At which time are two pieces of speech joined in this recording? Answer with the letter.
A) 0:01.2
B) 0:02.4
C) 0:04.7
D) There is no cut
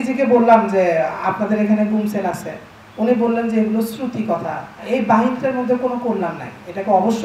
C